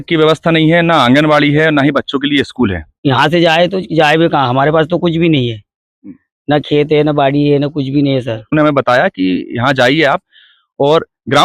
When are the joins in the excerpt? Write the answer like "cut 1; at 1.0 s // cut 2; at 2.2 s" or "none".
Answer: cut 1; at 3.0 s // cut 2; at 8.5 s